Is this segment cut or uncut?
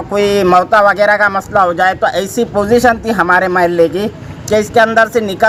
uncut